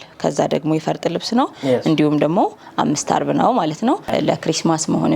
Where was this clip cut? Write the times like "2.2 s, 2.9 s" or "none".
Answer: 4.1 s